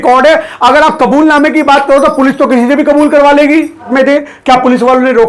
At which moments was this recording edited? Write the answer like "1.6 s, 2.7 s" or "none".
3.9 s